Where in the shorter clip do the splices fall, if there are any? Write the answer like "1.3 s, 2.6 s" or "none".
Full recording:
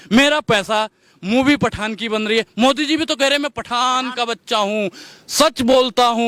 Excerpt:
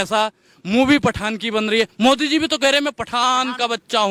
none

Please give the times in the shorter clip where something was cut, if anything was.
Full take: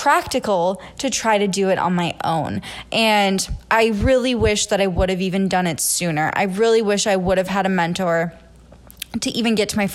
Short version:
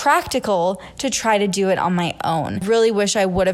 2.6 s

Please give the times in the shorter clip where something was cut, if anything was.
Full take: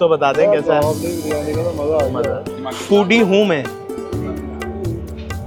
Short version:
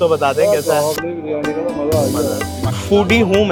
none

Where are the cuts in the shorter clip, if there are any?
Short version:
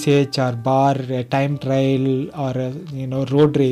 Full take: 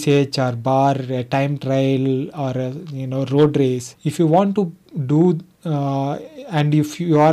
none

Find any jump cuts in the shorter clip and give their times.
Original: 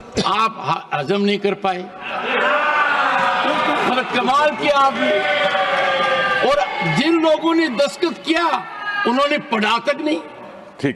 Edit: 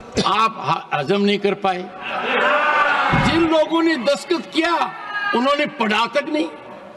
3.1 s

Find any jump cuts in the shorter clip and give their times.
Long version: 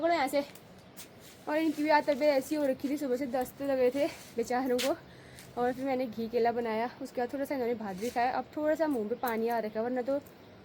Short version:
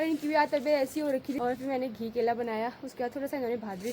1.3 s

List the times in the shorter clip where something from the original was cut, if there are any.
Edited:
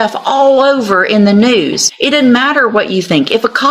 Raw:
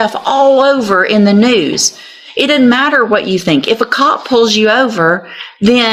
1.9 s

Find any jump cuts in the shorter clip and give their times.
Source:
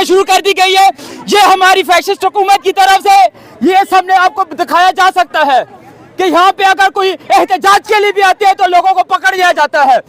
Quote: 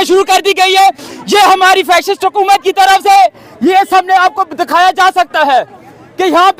none

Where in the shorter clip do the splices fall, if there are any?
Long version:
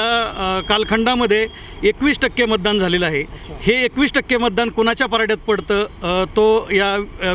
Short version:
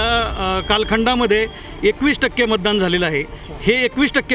none

